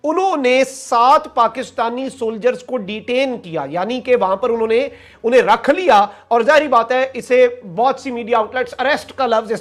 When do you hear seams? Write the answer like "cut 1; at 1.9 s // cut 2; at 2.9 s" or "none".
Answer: none